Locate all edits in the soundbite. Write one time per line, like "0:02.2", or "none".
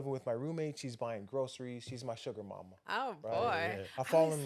none